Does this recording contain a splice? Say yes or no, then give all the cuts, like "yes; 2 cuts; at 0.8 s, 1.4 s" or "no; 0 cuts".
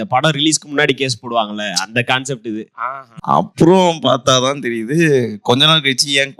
yes; 1 cut; at 3.2 s